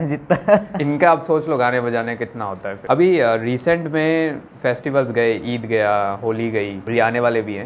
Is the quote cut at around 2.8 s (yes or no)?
no